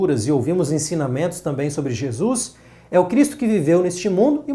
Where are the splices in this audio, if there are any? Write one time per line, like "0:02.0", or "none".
none